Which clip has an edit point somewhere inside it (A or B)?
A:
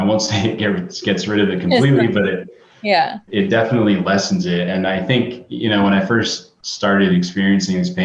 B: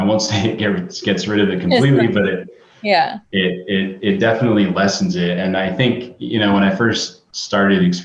A